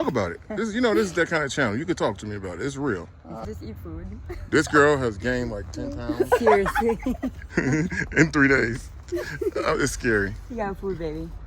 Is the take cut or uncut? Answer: cut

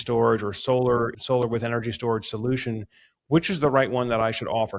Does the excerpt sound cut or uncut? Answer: cut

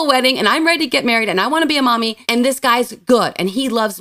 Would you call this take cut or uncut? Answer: uncut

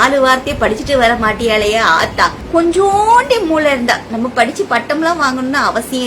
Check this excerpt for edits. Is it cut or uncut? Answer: cut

